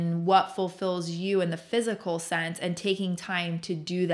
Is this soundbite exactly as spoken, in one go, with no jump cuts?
yes; 0 cuts

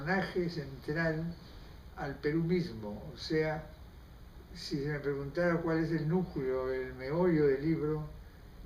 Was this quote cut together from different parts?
yes; 1 cut; at 1.0 s

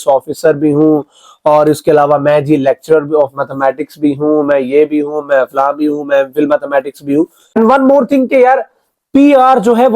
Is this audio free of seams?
no; 1 cut; at 7.6 s

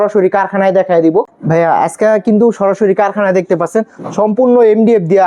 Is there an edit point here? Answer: yes; 1 cut; at 1.4 s

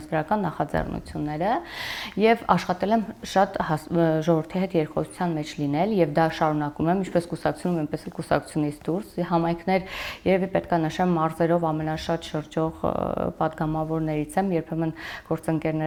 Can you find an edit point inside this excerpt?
no; 0 cuts

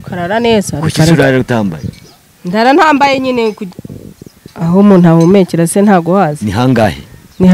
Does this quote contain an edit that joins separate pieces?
yes; 1 cut; at 3.7 s

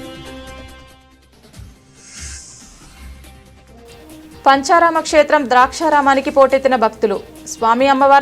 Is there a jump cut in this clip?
yes; 2 cuts; at 3.1 s, 4.4 s

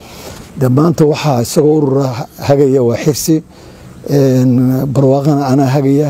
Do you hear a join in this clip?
no; 0 cuts

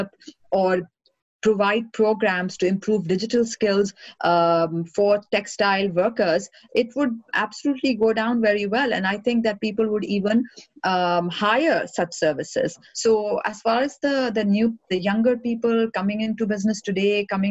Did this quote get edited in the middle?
yes; 1 cut; at 12.8 s

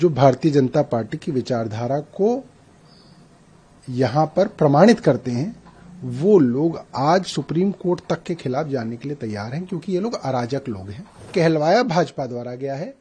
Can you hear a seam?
yes; 1 cut; at 11.3 s

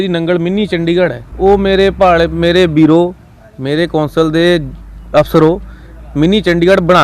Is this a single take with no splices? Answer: no; 1 cut; at 1.2 s

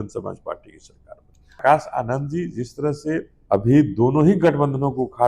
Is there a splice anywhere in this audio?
yes; 2 cuts; at 1.6 s, 3.3 s

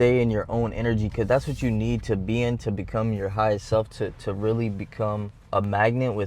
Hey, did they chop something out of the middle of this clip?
yes; 1 cut; at 5.3 s

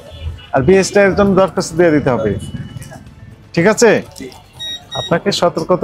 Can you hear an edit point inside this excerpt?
no; 0 cuts

